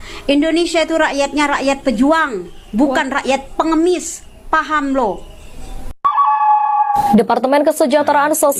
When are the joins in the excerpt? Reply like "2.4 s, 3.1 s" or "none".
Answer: none